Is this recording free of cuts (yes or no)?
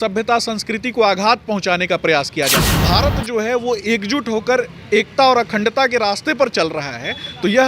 no